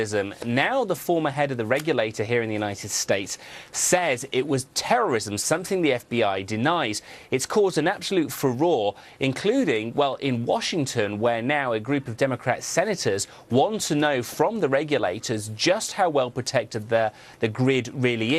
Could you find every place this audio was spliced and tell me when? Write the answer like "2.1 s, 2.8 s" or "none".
none